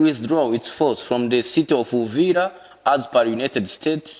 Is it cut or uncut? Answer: uncut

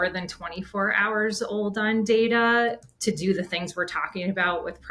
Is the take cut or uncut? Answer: uncut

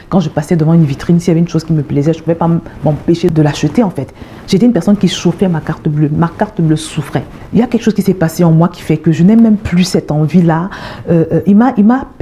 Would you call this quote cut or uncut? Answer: cut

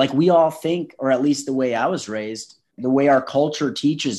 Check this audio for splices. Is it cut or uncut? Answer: cut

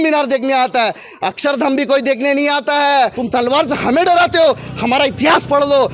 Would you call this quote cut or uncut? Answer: cut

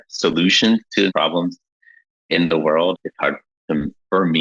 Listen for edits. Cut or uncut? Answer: cut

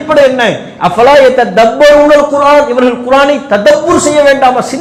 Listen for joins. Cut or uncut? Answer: uncut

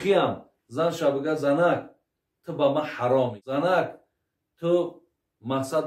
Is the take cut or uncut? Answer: cut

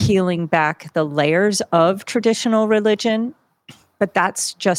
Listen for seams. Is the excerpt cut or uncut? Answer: uncut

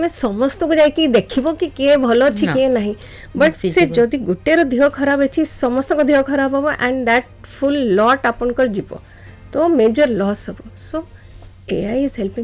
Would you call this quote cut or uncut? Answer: uncut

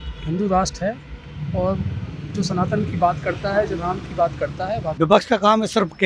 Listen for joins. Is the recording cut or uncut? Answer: cut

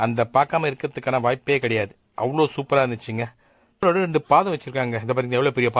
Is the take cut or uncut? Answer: cut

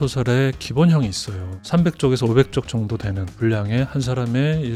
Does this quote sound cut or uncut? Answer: uncut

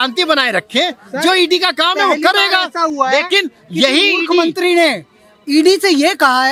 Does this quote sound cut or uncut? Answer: uncut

